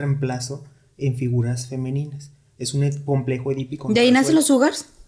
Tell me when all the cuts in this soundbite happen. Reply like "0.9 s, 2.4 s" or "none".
none